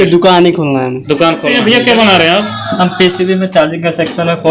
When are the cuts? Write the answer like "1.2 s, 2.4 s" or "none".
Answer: 1.6 s